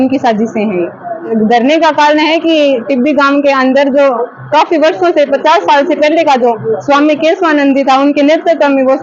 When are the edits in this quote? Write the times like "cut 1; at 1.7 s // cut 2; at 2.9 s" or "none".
none